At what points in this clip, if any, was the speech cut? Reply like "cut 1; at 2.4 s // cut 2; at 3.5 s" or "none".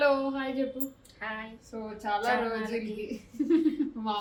none